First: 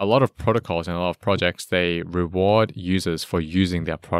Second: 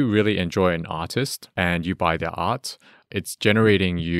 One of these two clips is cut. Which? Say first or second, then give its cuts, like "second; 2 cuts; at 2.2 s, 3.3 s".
second; 1 cut; at 3.0 s